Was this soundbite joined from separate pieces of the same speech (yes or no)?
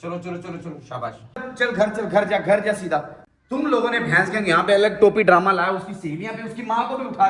yes